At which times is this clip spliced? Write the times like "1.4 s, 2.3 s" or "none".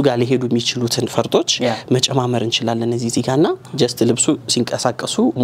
none